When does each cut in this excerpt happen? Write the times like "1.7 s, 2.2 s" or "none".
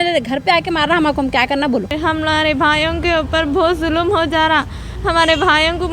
1.9 s